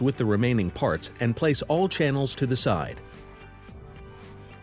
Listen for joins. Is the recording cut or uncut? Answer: cut